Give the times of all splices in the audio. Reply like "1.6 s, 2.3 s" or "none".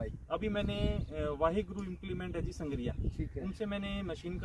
none